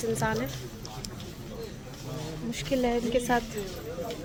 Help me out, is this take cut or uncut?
uncut